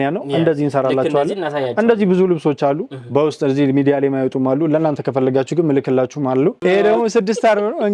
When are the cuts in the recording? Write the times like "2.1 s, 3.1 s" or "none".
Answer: 6.6 s